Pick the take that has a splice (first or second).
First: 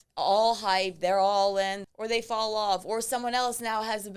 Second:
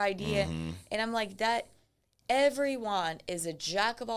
first